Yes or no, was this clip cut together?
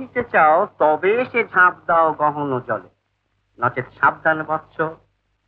no